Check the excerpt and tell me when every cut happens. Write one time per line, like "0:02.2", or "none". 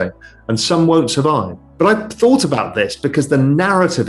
0:01.6